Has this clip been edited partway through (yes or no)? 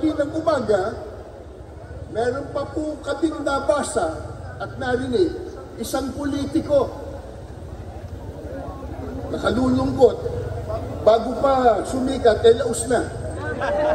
no